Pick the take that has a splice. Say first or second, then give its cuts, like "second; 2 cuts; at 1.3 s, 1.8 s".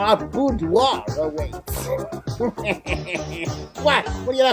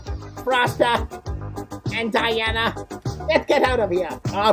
second; 1 cut; at 3.1 s